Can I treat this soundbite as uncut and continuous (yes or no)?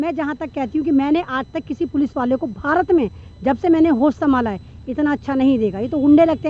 yes